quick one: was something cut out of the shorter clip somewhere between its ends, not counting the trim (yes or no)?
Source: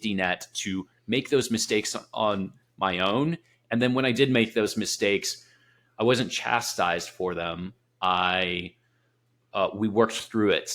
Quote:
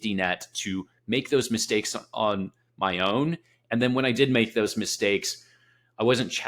no